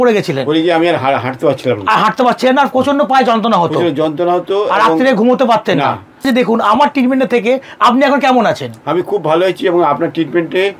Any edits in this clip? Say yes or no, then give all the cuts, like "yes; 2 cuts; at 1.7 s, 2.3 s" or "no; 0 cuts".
yes; 1 cut; at 6.3 s